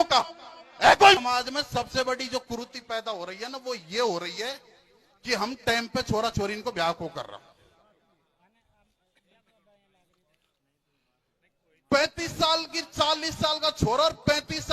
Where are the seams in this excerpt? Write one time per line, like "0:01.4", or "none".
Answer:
0:01.2